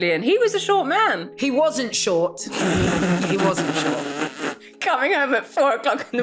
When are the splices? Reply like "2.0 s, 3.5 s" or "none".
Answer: 1.3 s, 4.6 s